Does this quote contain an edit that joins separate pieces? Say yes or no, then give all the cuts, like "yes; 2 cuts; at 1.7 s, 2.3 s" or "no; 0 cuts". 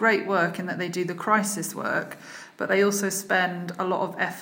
no; 0 cuts